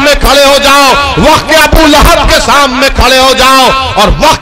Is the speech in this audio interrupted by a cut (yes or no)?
no